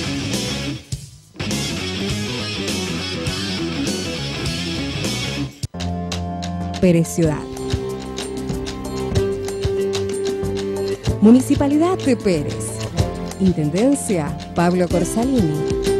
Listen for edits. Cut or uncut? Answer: cut